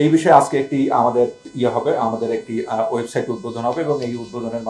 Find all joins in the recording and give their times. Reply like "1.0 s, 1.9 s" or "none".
1.4 s